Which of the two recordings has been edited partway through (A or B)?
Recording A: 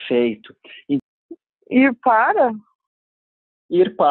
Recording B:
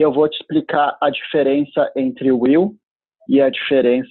A